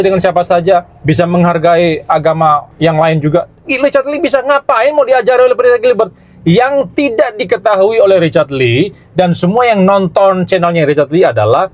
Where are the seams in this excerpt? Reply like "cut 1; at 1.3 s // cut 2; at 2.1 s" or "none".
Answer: cut 1; at 0.9 s // cut 2; at 2.7 s